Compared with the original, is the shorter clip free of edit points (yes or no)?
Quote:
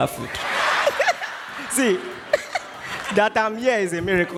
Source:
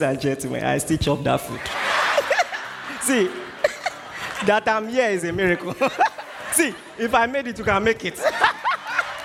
yes